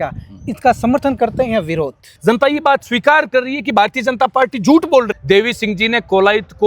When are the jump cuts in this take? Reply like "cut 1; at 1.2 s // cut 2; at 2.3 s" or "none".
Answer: cut 1; at 2.1 s // cut 2; at 5.1 s